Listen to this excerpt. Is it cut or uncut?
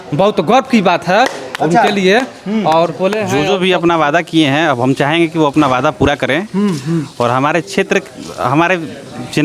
cut